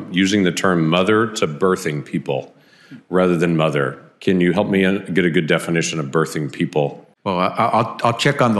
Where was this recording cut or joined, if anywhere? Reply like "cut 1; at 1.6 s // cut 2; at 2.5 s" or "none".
cut 1; at 7.1 s